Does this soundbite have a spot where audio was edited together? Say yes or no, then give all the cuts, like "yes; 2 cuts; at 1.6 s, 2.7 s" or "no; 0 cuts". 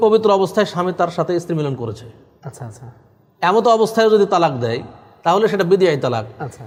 no; 0 cuts